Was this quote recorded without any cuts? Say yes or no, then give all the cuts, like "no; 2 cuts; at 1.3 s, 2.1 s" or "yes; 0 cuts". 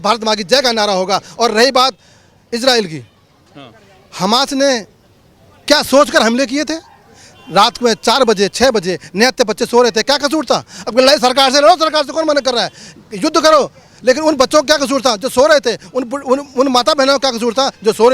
yes; 0 cuts